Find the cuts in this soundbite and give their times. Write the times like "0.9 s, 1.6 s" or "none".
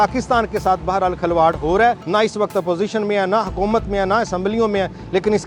2.0 s